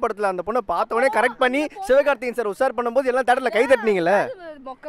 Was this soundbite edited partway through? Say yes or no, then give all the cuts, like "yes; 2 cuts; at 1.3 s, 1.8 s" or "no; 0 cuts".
no; 0 cuts